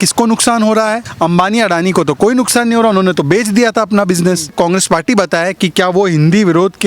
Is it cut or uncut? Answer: cut